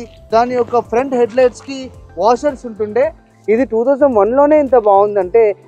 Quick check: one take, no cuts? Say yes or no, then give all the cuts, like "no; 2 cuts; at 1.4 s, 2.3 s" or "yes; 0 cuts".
no; 1 cut; at 3.2 s